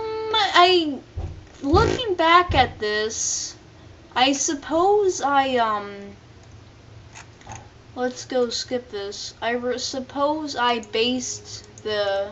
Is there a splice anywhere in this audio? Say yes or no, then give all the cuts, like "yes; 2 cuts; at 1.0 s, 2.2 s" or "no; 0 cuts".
yes; 1 cut; at 7.4 s